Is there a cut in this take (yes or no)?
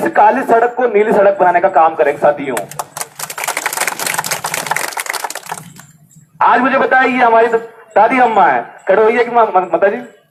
no